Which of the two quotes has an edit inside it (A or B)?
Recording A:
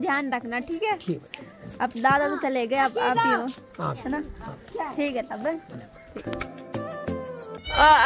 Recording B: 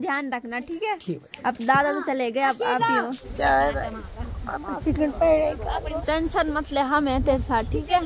B